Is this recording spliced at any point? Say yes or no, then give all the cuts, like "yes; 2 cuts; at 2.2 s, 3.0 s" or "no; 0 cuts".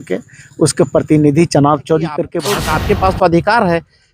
yes; 1 cut; at 2.4 s